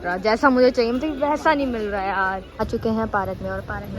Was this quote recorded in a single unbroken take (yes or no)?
no